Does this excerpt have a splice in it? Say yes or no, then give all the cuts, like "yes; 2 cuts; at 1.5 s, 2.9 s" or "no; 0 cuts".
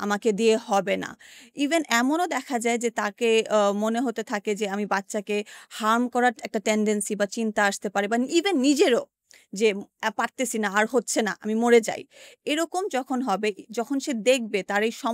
no; 0 cuts